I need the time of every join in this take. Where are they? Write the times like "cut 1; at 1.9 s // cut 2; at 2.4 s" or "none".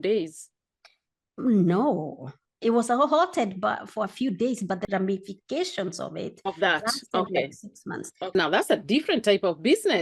cut 1; at 4.8 s // cut 2; at 8.3 s